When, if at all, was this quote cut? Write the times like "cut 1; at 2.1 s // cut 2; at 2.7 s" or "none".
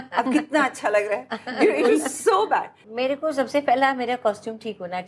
cut 1; at 2.8 s